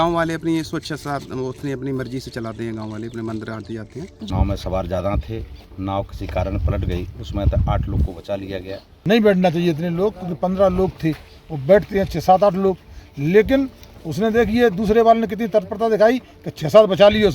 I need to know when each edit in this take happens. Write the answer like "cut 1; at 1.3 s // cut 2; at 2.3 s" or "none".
cut 1; at 4.1 s // cut 2; at 8.9 s